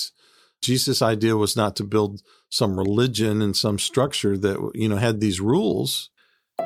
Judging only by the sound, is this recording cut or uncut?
uncut